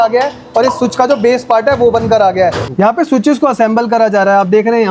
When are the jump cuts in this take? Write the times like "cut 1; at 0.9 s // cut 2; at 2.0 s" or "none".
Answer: cut 1; at 2.6 s